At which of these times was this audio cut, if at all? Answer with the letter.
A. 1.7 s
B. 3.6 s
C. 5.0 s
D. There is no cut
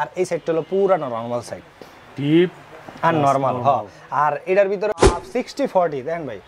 C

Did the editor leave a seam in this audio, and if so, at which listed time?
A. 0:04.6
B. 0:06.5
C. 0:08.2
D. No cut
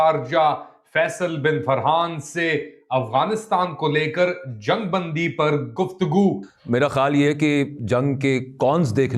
B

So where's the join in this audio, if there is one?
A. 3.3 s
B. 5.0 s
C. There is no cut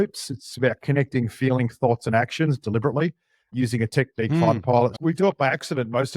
B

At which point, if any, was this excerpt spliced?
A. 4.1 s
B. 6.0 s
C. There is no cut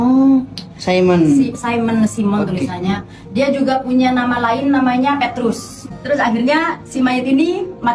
B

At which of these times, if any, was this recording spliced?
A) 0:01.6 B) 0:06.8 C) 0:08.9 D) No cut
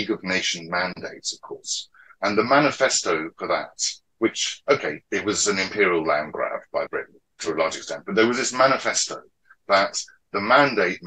B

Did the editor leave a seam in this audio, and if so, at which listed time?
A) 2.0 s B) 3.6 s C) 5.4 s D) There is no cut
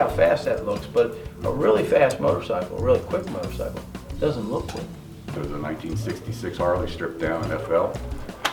C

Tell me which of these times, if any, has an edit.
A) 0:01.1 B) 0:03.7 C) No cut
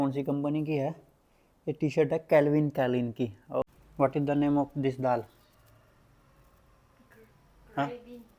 B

